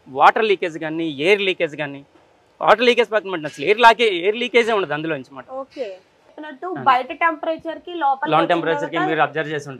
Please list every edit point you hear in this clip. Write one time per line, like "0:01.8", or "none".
0:06.3

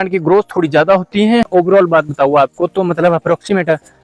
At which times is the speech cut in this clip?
0:01.5

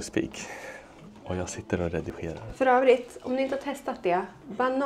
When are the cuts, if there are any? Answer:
0:02.5

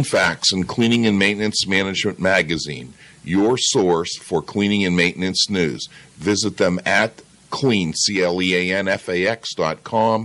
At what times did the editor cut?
none

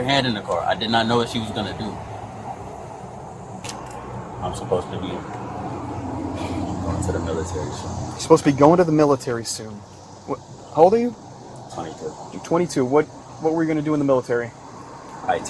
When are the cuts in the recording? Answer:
0:03.6

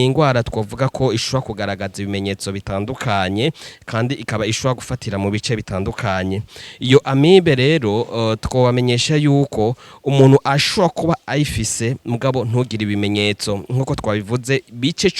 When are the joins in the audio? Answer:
none

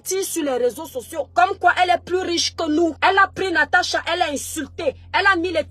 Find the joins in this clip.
0:01.3
0:03.0

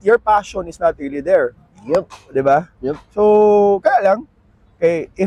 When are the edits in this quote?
none

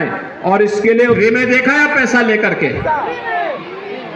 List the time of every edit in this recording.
0:01.2

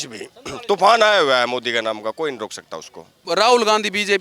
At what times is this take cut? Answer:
0:03.2

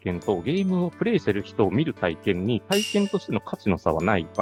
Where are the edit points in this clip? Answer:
none

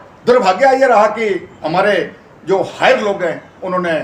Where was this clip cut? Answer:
none

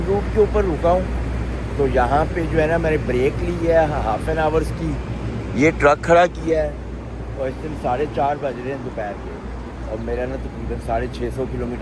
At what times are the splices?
none

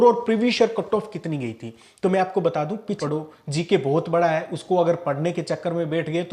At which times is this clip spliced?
0:03.0

